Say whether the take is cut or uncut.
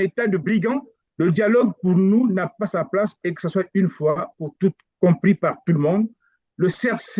cut